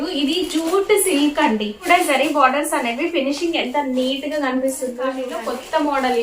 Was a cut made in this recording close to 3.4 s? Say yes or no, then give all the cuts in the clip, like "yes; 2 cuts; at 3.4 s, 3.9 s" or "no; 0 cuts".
no; 2 cuts; at 1.8 s, 5.3 s